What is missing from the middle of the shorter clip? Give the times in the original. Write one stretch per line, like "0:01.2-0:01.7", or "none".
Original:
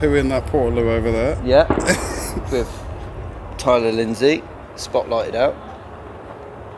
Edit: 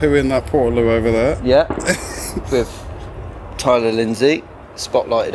none